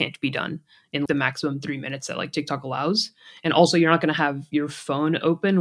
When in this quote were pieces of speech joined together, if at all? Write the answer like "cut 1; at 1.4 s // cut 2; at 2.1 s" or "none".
cut 1; at 1.1 s